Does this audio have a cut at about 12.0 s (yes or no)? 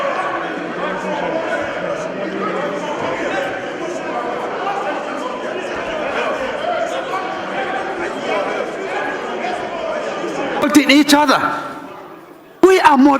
no